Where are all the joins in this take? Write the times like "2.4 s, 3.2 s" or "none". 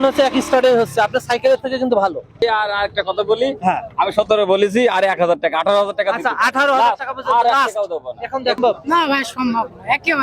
2.3 s, 8.6 s